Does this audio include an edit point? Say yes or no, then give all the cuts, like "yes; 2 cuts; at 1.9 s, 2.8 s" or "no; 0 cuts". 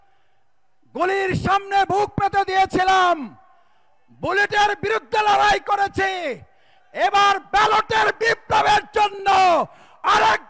no; 0 cuts